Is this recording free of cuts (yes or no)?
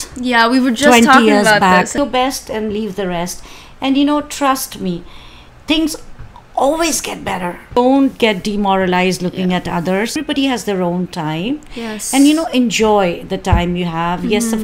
no